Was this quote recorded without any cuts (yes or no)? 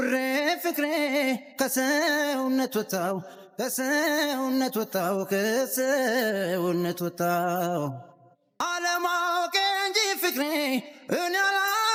yes